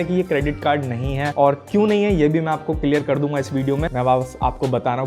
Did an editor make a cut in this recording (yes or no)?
yes